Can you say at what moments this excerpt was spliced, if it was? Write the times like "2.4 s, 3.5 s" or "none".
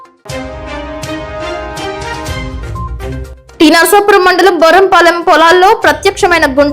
2.2 s